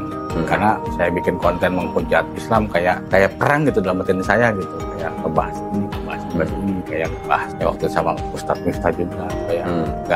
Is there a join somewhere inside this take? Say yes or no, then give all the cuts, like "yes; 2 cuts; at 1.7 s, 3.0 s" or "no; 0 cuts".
no; 0 cuts